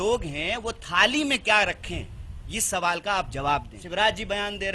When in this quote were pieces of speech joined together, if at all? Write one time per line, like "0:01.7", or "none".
0:03.8